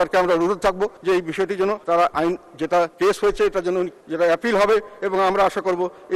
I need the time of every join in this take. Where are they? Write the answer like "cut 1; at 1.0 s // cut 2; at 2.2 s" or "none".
cut 1; at 1.0 s // cut 2; at 1.8 s // cut 3; at 2.9 s // cut 4; at 4.0 s